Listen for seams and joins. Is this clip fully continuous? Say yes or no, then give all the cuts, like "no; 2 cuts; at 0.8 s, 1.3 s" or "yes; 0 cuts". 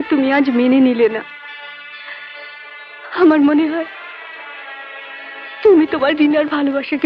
yes; 0 cuts